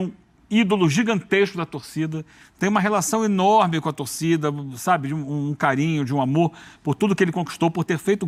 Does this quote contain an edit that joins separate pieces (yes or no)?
no